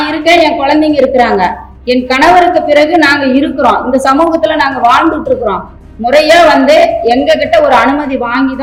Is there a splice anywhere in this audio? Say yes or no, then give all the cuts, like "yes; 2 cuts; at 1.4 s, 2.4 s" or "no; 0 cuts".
no; 0 cuts